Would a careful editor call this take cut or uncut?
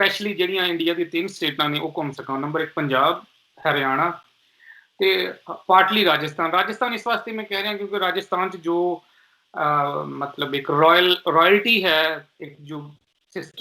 uncut